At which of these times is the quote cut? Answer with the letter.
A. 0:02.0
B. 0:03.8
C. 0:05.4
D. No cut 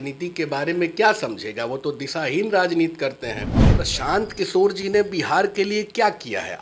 B